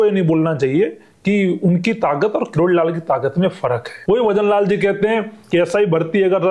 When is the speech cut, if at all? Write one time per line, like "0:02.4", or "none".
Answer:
0:03.9